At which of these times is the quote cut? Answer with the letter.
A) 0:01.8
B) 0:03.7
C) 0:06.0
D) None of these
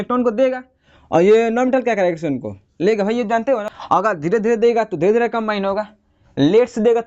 B